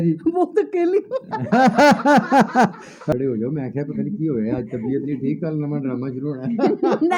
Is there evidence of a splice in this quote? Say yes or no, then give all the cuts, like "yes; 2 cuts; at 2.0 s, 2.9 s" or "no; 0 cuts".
yes; 1 cut; at 3.0 s